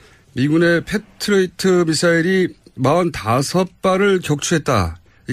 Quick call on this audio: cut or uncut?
cut